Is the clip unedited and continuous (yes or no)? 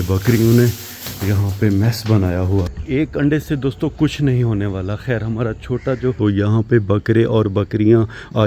no